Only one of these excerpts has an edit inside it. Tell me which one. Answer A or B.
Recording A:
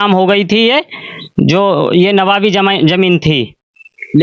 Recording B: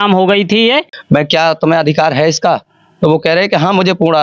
B